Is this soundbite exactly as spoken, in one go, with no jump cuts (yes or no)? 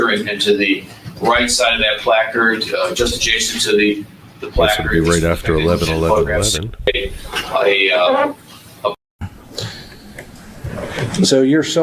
no